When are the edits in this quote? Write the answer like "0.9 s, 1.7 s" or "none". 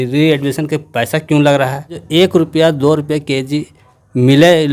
2.0 s